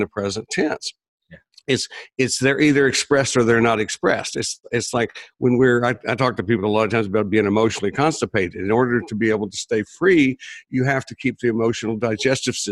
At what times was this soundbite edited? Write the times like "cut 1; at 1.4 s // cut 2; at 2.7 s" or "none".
none